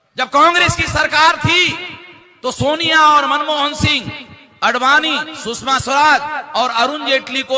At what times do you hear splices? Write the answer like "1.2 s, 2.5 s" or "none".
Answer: none